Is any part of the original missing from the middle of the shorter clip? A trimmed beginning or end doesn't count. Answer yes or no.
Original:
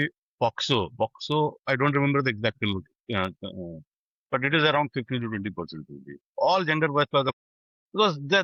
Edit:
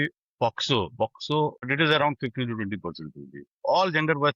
yes